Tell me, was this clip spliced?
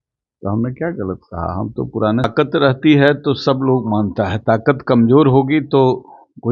yes; 1 cut; at 2.2 s

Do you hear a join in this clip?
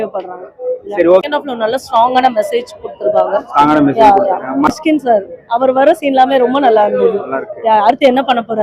yes; 2 cuts; at 1.2 s, 4.7 s

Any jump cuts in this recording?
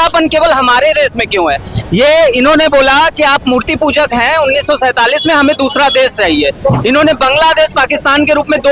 no; 0 cuts

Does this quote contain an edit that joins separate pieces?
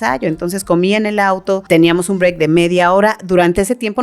yes; 1 cut; at 1.6 s

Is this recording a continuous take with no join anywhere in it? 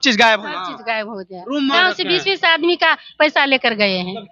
no; 1 cut; at 1.7 s

